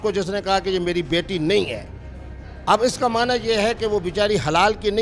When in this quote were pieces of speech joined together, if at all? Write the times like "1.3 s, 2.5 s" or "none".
none